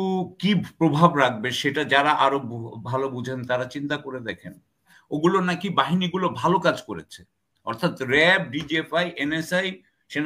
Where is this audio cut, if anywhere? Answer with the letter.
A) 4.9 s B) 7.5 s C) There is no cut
A